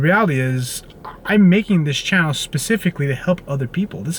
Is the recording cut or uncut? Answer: uncut